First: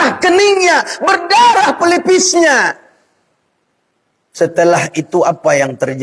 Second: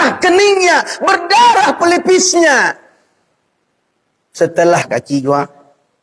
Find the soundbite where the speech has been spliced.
second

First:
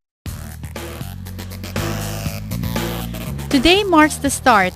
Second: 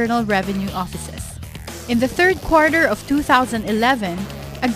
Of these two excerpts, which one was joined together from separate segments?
second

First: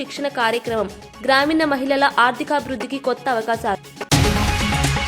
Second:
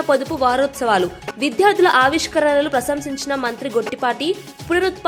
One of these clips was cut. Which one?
first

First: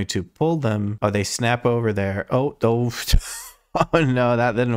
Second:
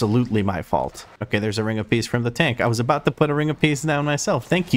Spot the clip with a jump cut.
second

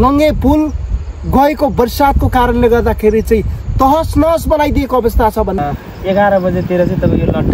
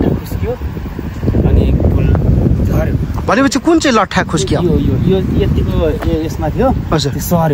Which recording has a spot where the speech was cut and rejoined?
first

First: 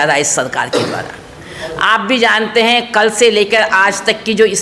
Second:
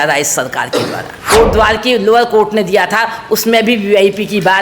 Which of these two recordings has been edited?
second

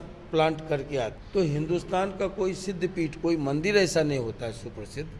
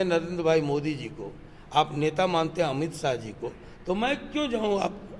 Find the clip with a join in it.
first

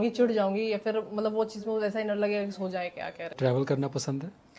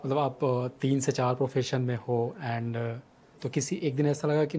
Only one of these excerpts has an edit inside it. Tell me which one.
first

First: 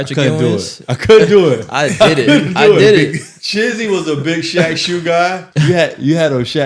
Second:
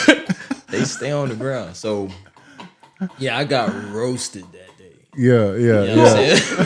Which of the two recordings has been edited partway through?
first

